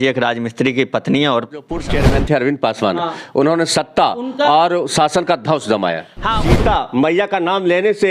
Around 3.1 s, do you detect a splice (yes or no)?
no